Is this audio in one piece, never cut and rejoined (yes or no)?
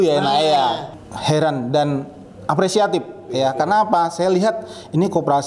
no